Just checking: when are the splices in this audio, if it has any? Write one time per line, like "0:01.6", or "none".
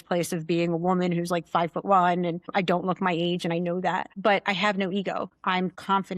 0:02.4
0:04.1
0:05.3